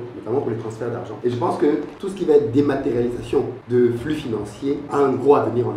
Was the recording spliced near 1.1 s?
yes; 4 cuts; at 1.1 s, 2.0 s, 3.6 s, 4.8 s

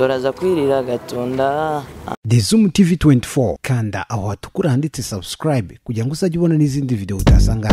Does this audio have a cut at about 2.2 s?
yes; 1 cut; at 2.2 s

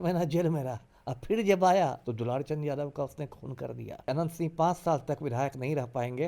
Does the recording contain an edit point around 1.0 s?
no; 1 cut; at 4.1 s

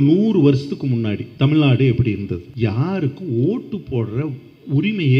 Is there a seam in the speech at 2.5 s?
yes; 2 cuts; at 1.3 s, 2.5 s

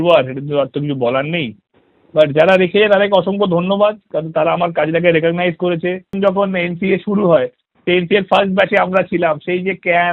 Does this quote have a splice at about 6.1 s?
yes; 1 cut; at 6.1 s

